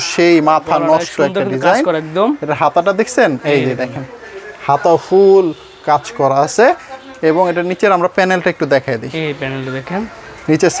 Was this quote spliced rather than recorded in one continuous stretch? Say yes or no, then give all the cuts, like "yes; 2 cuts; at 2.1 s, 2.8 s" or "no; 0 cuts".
no; 0 cuts